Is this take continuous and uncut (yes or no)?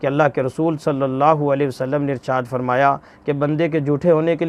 yes